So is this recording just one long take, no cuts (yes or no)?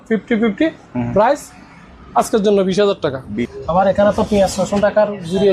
no